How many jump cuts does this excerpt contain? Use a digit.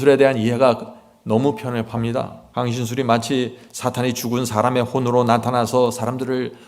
1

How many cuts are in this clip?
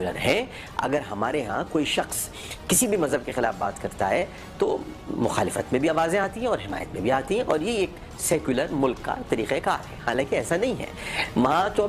0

